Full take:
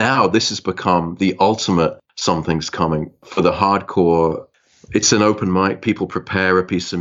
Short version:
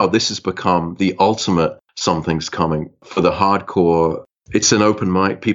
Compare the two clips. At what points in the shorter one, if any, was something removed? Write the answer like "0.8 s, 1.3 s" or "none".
4.3 s